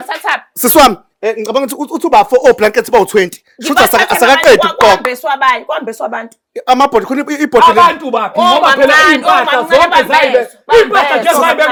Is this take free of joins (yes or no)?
yes